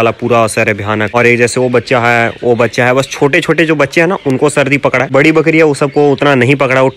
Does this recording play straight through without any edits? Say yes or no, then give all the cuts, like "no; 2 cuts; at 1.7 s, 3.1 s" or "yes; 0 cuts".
yes; 0 cuts